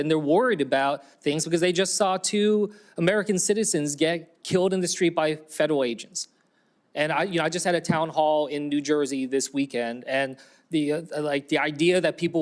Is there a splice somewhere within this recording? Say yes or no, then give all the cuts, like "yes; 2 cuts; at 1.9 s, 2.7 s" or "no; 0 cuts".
yes; 1 cut; at 7.2 s